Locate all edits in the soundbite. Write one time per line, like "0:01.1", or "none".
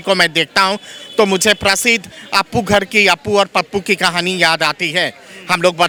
none